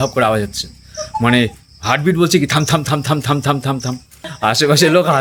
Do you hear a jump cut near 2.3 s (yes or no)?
no